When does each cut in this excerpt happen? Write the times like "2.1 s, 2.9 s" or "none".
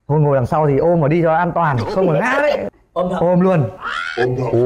2.6 s